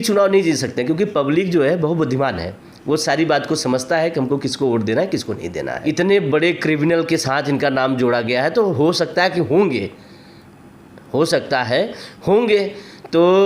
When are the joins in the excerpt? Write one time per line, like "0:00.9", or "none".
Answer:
0:05.7